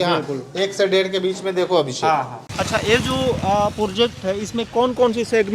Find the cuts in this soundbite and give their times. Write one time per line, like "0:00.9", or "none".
0:02.4